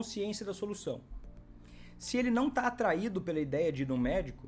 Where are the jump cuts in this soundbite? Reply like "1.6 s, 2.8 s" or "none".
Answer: none